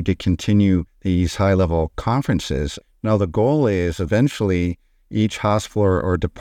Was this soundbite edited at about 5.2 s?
no; 2 cuts; at 0.9 s, 2.8 s

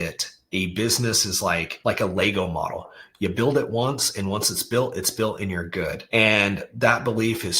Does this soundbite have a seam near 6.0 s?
yes; 2 cuts; at 1.7 s, 6.0 s

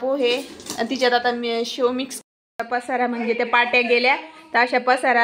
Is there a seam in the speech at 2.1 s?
yes; 1 cut; at 2.1 s

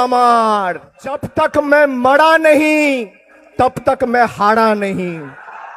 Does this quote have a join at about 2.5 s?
no; 1 cut; at 1.2 s

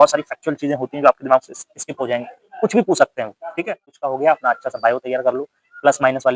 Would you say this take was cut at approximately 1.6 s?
no; 1 cut; at 4.0 s

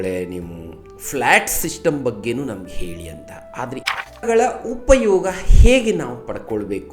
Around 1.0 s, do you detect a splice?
no; 1 cut; at 4.2 s

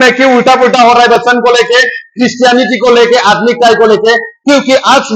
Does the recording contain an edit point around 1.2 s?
no; 0 cuts

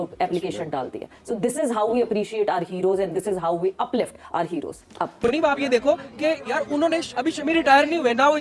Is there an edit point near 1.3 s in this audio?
no; 1 cut; at 5.1 s

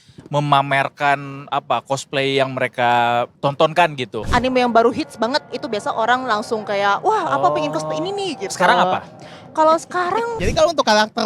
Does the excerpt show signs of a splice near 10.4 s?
yes; 3 cuts; at 3.3 s, 4.2 s, 10.4 s

